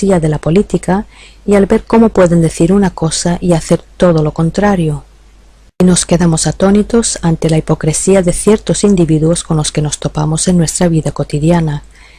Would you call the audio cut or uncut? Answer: cut